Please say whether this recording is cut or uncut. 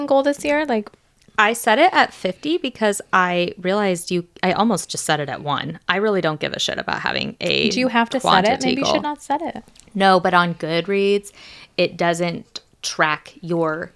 uncut